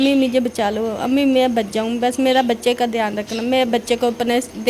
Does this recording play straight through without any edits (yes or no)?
yes